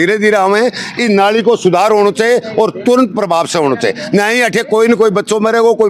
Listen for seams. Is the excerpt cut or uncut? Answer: uncut